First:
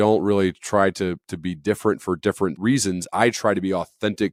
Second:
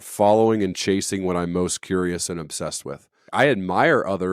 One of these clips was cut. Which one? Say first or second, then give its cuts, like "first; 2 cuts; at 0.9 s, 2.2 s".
second; 1 cut; at 3.2 s